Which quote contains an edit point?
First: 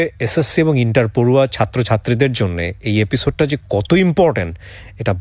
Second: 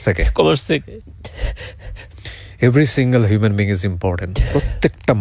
second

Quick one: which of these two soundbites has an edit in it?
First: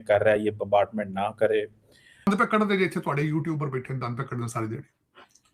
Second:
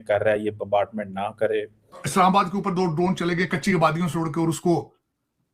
second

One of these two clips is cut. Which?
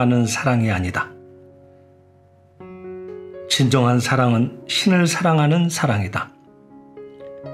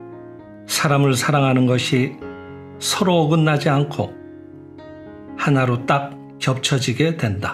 first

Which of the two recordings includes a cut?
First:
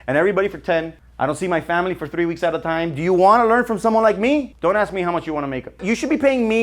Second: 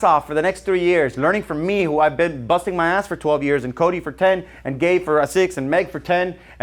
first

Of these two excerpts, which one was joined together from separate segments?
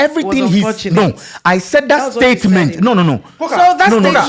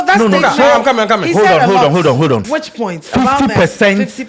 second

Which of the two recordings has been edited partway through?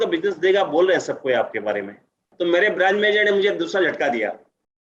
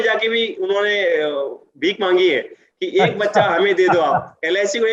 first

